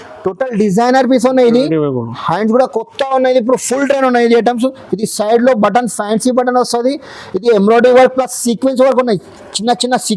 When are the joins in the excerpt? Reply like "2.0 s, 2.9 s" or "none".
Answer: none

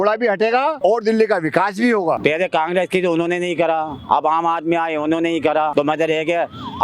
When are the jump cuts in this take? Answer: 0.8 s, 2.2 s, 5.7 s

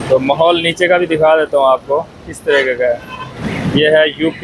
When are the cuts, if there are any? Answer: 3.4 s

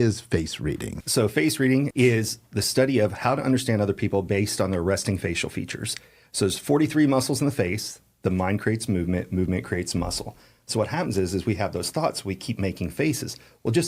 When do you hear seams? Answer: 0.9 s, 1.9 s

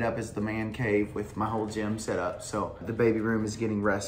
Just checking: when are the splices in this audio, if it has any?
2.8 s

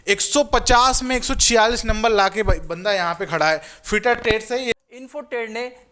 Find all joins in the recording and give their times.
4.7 s

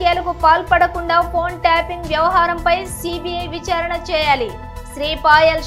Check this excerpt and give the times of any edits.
none

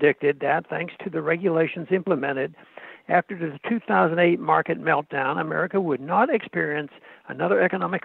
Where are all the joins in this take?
none

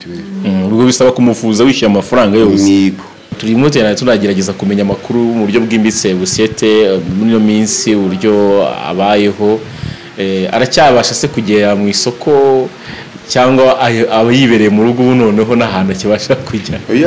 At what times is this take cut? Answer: 3.3 s

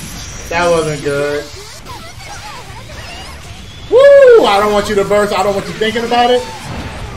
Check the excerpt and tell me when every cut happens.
1.8 s

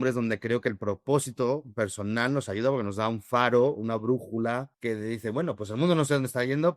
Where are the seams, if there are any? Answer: 1.7 s, 4.7 s

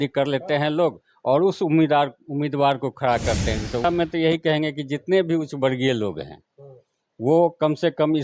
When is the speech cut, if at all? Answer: 3.8 s

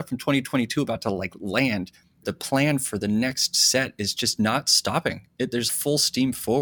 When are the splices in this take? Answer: 2.2 s, 5.7 s

